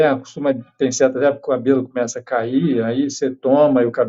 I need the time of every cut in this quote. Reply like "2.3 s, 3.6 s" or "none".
none